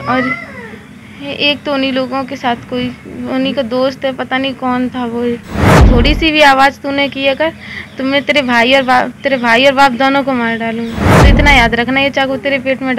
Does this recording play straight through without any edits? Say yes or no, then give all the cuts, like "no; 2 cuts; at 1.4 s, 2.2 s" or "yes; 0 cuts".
no; 2 cuts; at 5.8 s, 11.1 s